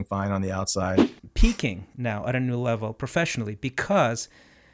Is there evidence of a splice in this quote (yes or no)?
yes